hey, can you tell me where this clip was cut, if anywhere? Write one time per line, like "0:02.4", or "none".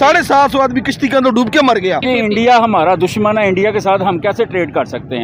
0:02.0

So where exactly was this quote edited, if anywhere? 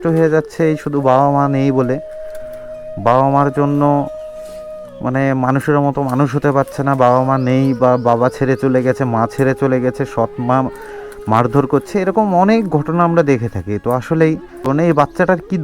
0:14.7

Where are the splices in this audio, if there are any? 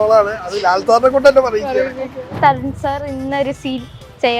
0:02.3

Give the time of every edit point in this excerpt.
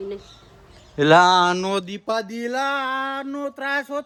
none

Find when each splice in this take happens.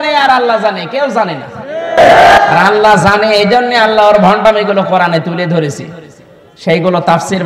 none

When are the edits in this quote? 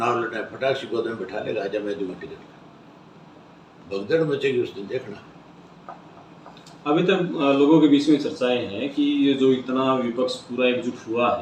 none

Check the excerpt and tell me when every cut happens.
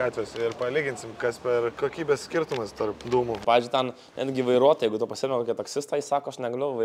0:01.8
0:03.4

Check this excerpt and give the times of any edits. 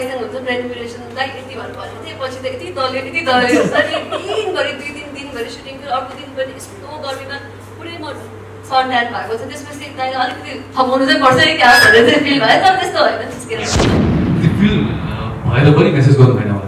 0:14.0

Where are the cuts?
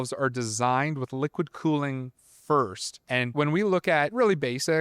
0:03.3

